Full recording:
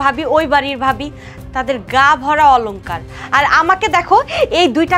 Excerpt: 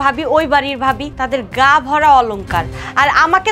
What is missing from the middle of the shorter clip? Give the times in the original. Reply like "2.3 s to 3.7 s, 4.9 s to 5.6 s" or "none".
1.1 s to 1.5 s